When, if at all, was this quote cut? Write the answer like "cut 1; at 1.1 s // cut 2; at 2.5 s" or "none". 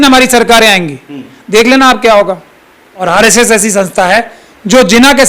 cut 1; at 3.0 s